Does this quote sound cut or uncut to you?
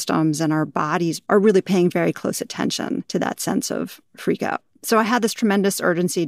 cut